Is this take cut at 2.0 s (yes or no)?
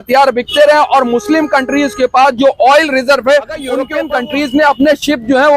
no